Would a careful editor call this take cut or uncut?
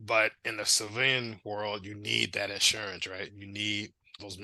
uncut